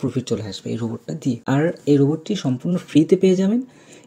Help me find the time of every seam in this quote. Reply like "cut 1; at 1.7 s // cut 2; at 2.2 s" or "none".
cut 1; at 1.4 s